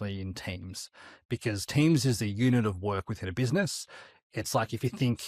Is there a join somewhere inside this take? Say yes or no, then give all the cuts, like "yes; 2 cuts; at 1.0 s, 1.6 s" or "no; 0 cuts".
no; 0 cuts